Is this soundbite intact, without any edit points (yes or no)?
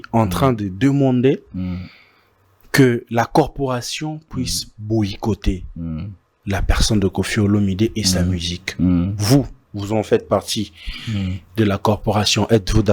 yes